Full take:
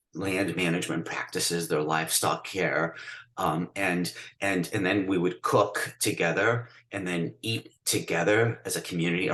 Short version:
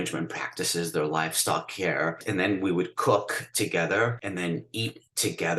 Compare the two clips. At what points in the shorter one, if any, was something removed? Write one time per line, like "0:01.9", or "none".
0:02.2
0:04.2